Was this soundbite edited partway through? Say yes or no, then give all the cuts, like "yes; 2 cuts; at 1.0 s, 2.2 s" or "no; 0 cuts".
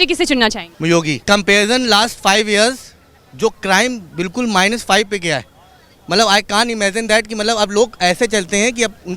yes; 1 cut; at 1.1 s